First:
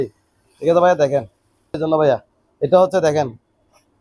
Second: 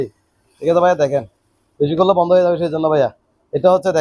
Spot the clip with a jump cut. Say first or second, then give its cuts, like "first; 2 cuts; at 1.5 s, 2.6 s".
first; 1 cut; at 1.7 s